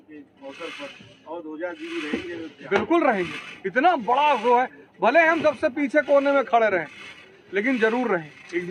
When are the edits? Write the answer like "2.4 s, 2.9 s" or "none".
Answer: none